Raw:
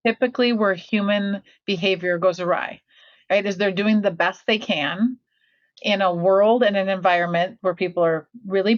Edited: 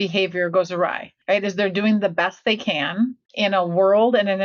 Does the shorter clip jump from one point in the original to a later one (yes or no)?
yes